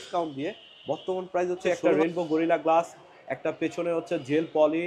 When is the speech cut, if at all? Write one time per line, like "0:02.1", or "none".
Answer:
0:01.6